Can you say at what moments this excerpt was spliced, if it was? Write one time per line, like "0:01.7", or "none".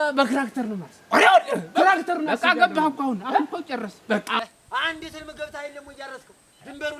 0:04.4